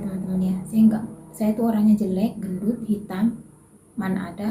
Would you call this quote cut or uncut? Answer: uncut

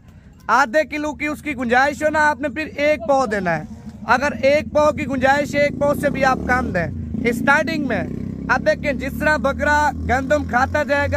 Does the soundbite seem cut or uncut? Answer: uncut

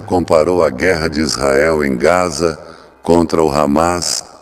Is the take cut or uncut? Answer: uncut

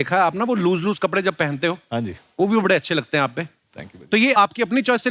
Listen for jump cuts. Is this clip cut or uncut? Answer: uncut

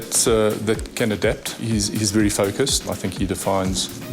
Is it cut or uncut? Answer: cut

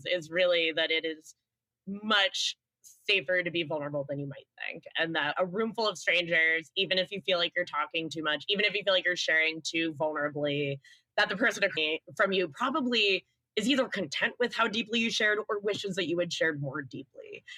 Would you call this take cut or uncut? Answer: uncut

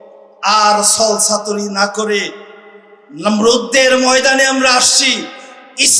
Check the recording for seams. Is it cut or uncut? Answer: uncut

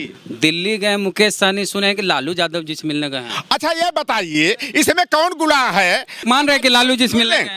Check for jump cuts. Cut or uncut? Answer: cut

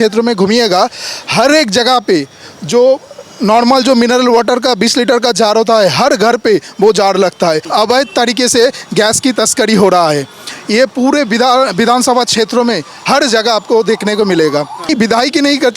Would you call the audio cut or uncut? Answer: cut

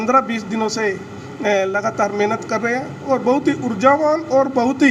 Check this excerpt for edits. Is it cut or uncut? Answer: uncut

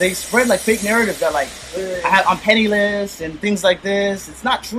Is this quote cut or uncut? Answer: uncut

